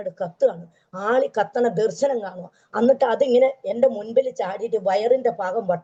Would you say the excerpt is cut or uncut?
uncut